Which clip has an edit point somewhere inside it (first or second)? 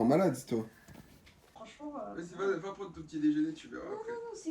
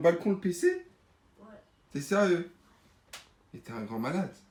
first